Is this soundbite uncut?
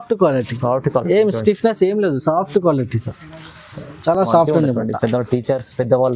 yes; 0 cuts

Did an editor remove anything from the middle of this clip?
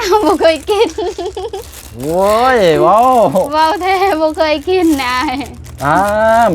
no; 0 cuts

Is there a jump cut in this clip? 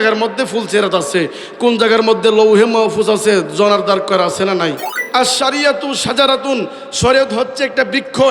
yes; 1 cut; at 4.9 s

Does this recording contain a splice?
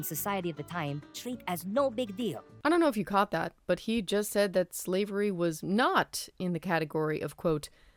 no; 0 cuts

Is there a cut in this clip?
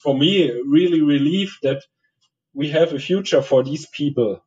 no; 0 cuts

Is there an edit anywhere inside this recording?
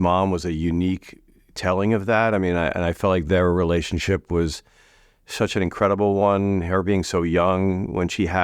no; 0 cuts

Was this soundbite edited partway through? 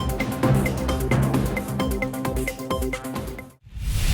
yes; 1 cut; at 0.9 s

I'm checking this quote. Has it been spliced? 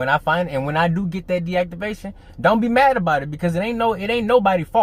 no; 0 cuts

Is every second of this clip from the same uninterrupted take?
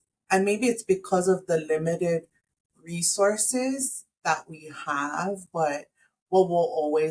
no; 1 cut; at 4.0 s

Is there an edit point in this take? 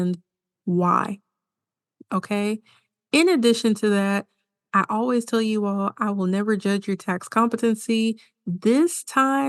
no; 0 cuts

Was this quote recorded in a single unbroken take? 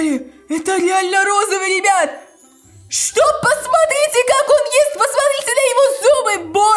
yes; 0 cuts

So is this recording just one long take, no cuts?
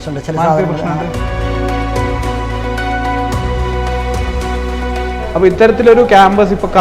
yes; 0 cuts

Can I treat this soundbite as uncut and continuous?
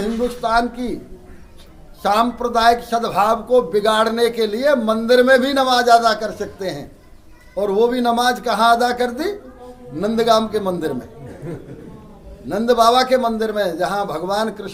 yes; 0 cuts

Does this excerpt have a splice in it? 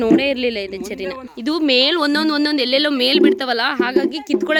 no; 0 cuts

